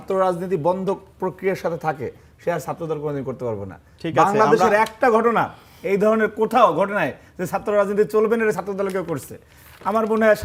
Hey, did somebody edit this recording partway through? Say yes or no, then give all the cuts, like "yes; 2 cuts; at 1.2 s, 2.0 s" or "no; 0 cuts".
no; 0 cuts